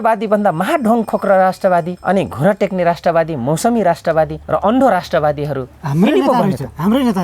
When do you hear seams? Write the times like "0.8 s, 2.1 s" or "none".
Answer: 1.9 s, 4.4 s